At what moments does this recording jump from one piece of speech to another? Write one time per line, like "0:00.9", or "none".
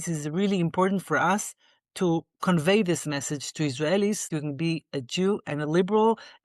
0:04.3